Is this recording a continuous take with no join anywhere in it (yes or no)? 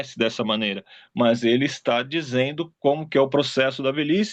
yes